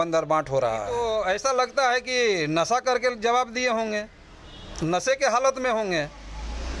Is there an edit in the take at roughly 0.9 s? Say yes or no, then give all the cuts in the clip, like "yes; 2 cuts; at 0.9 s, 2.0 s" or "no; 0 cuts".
yes; 1 cut; at 0.9 s